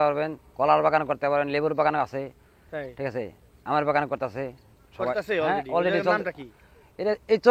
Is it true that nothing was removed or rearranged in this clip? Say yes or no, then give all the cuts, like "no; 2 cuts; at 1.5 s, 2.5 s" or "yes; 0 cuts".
yes; 0 cuts